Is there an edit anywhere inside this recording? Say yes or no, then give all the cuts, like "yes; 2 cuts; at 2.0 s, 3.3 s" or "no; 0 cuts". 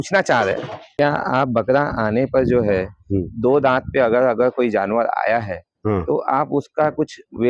yes; 1 cut; at 0.9 s